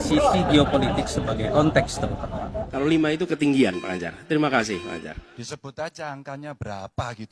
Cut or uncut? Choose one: cut